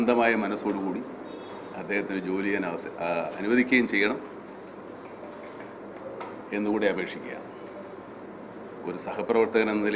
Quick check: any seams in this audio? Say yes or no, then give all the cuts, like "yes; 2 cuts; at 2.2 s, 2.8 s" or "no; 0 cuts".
no; 0 cuts